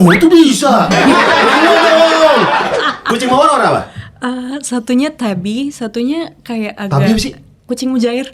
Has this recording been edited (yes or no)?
yes